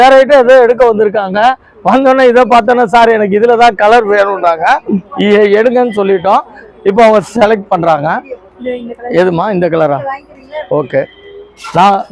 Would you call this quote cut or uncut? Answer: uncut